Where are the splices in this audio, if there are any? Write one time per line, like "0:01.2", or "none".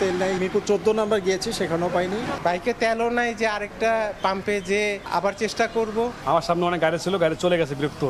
none